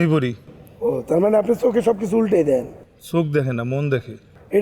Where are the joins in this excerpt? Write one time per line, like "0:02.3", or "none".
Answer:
none